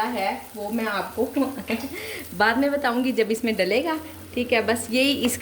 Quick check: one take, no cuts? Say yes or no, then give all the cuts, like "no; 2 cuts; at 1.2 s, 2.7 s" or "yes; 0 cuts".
yes; 0 cuts